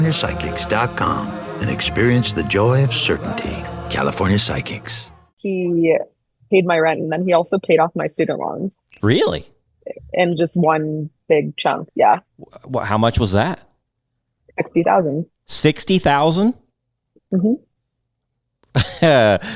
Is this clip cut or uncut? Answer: cut